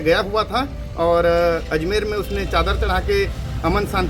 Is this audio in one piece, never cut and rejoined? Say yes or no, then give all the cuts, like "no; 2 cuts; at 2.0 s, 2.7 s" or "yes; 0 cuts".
yes; 0 cuts